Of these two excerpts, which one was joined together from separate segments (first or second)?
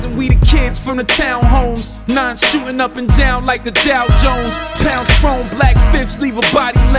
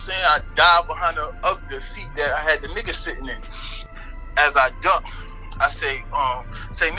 second